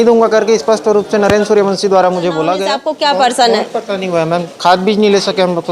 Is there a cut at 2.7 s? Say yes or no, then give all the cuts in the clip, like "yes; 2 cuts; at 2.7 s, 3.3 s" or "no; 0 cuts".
yes; 1 cut; at 2.7 s